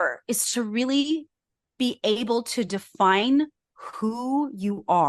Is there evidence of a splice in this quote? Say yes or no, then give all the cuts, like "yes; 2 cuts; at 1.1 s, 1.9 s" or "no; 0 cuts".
no; 0 cuts